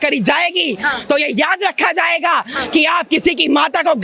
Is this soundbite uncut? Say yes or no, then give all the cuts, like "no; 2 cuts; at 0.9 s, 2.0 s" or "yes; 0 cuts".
yes; 0 cuts